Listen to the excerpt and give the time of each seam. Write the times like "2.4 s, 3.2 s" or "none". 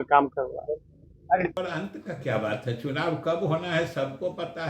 1.5 s